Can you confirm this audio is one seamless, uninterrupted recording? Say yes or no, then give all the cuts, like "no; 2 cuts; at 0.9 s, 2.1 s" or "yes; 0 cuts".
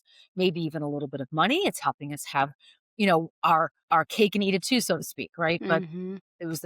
no; 1 cut; at 3.8 s